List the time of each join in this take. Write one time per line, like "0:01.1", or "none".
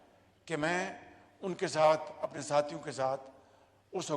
none